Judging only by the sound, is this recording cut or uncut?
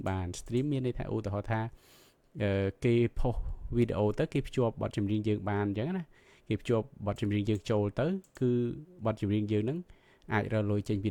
uncut